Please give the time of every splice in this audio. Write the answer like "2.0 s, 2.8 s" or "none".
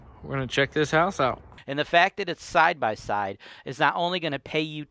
1.5 s